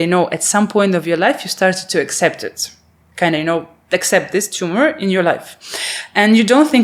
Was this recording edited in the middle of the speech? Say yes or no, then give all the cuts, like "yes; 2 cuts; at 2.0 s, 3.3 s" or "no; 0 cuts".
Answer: no; 0 cuts